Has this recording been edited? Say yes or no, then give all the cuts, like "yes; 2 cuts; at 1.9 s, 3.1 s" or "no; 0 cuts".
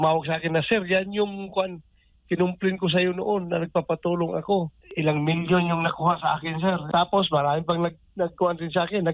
yes; 2 cuts; at 4.8 s, 6.8 s